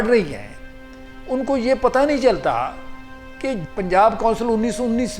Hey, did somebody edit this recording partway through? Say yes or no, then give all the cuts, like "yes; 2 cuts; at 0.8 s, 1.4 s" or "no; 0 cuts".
yes; 1 cut; at 3.6 s